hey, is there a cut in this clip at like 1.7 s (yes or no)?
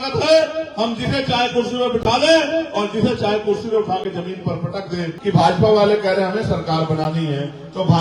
no